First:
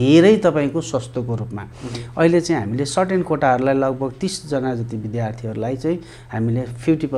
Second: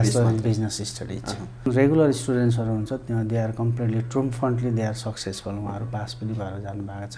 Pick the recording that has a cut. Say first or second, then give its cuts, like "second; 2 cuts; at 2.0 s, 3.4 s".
second; 1 cut; at 1.7 s